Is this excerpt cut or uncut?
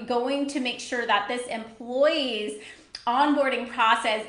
uncut